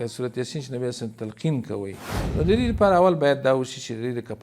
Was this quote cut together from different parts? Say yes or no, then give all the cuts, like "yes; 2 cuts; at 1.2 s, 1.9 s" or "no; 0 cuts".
yes; 1 cut; at 2.1 s